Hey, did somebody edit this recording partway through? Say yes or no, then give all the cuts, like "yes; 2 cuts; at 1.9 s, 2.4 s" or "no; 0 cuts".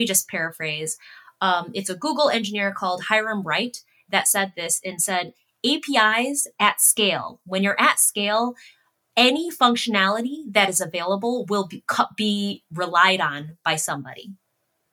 no; 0 cuts